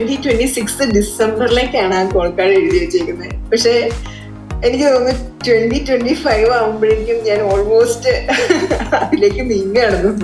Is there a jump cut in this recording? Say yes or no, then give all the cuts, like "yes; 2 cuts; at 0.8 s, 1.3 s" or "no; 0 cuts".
no; 0 cuts